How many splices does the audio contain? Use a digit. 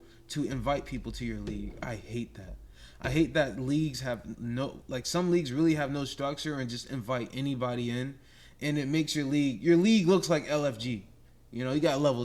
0